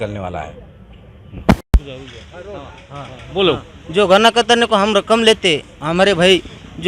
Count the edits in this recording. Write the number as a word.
one